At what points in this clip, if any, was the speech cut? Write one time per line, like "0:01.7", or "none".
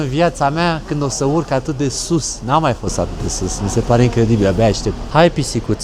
none